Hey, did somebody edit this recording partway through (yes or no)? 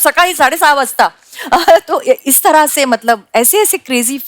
no